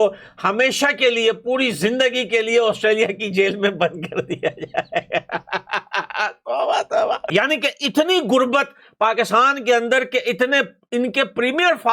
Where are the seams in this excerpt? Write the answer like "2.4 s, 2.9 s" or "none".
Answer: 7.2 s